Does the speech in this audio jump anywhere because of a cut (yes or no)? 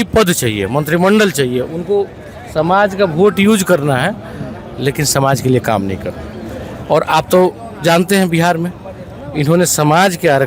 no